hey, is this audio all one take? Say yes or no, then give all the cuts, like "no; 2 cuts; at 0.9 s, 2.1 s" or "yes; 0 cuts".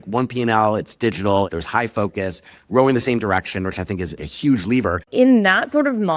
no; 3 cuts; at 1.5 s, 4.3 s, 5.1 s